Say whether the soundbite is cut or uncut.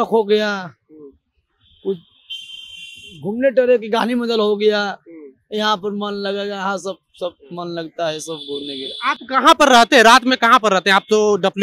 uncut